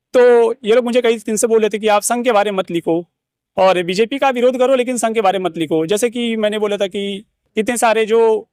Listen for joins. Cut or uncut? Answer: uncut